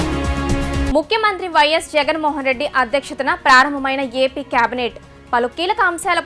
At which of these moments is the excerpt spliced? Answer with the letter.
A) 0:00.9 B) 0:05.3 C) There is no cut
A